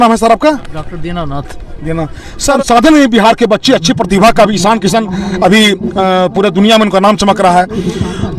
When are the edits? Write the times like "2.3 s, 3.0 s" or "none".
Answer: 2.6 s